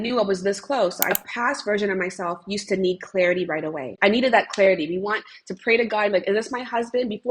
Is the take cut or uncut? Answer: cut